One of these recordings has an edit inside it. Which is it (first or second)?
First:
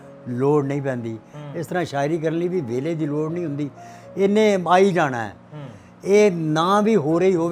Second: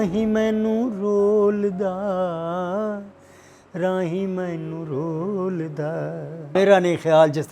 second